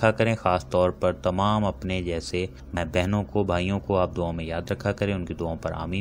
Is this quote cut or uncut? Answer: cut